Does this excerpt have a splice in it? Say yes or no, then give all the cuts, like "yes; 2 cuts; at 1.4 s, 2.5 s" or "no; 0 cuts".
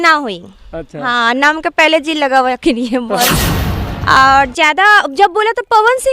yes; 1 cut; at 3.6 s